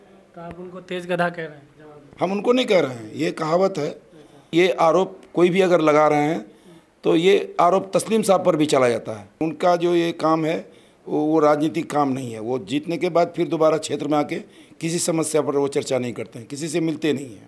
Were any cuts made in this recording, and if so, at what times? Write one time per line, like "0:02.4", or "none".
0:04.5
0:09.4